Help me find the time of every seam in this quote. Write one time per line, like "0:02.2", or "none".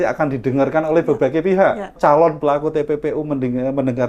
0:01.9